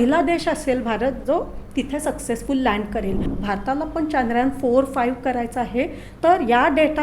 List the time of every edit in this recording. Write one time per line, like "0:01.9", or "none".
0:03.3